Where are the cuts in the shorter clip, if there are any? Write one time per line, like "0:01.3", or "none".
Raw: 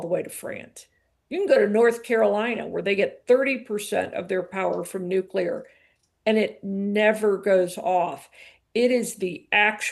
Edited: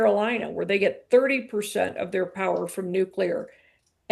none